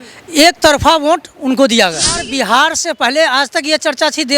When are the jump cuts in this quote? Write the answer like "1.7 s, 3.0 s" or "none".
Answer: 2.5 s